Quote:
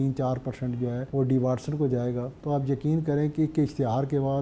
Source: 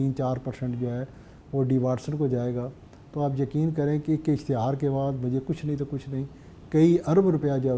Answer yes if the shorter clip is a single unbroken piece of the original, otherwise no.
no